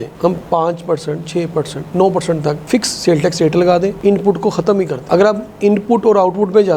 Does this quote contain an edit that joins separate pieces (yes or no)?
no